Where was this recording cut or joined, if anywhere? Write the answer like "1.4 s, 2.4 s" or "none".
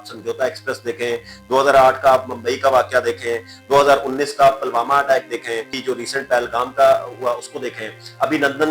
5.7 s